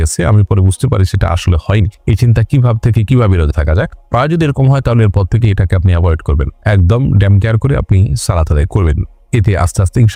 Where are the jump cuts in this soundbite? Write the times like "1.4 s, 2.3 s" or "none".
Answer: none